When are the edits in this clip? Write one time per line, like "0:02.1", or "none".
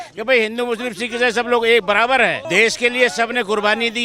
0:02.4